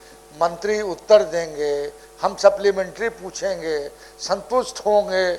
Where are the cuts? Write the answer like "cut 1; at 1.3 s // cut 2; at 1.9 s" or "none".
none